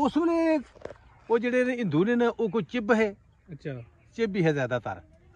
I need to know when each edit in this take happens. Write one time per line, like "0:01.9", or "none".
none